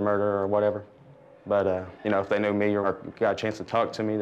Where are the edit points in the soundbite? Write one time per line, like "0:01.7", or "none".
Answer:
0:01.9
0:02.8